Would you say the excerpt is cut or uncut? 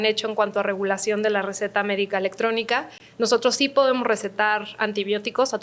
uncut